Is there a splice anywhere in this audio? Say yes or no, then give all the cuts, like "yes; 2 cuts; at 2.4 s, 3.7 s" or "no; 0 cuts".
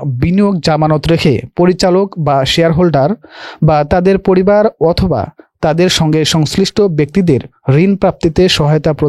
no; 0 cuts